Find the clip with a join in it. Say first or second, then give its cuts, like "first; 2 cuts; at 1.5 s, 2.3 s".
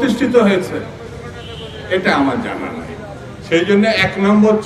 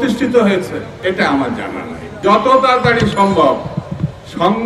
second; 2 cuts; at 0.9 s, 2.1 s